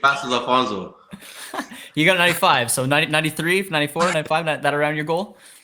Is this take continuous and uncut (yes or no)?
yes